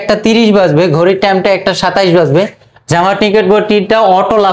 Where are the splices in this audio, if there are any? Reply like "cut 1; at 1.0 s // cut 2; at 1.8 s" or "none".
none